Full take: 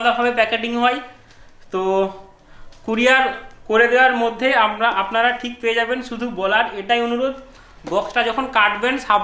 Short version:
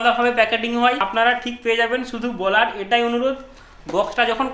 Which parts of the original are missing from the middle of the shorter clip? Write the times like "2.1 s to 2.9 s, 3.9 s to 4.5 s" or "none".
1.0 s to 5.0 s